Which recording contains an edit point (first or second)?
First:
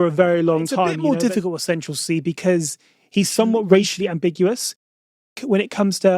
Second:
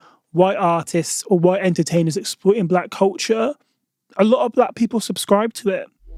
first